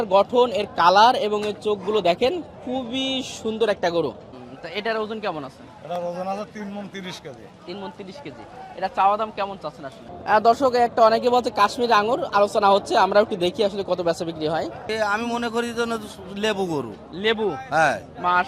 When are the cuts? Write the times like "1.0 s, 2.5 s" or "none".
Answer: 4.3 s, 10.1 s, 14.9 s